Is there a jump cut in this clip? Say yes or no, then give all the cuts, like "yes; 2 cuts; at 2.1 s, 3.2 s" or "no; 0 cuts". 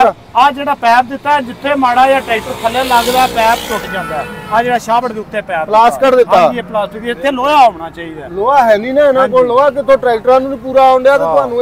no; 0 cuts